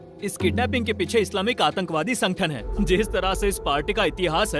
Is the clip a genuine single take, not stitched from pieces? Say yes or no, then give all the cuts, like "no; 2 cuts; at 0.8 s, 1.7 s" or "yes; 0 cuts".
no; 1 cut; at 2.7 s